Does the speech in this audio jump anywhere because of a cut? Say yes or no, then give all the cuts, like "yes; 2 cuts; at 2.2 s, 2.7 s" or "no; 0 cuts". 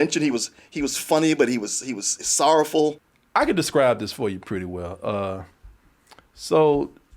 yes; 1 cut; at 3.1 s